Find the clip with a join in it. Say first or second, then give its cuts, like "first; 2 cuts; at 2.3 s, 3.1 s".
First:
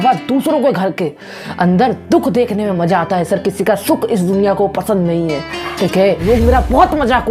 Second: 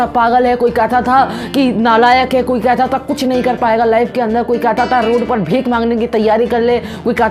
first; 1 cut; at 6.2 s